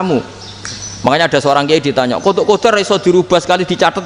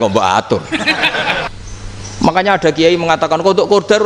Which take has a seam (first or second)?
second